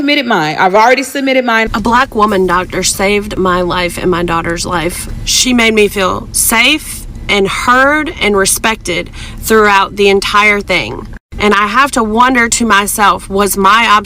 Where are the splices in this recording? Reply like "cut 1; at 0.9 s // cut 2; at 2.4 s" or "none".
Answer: cut 1; at 1.7 s // cut 2; at 5.0 s

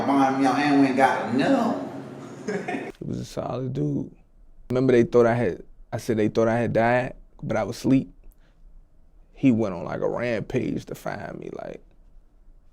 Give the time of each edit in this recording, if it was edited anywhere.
cut 1; at 2.8 s // cut 2; at 4.6 s

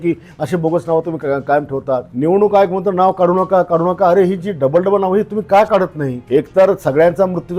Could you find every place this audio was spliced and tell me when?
cut 1; at 2.1 s // cut 2; at 6.1 s

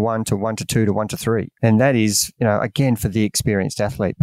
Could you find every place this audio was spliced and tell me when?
cut 1; at 1.5 s

